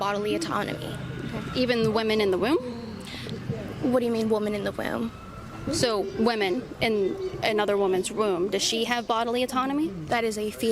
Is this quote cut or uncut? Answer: cut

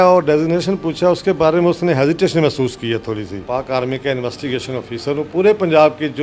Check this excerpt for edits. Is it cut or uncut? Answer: cut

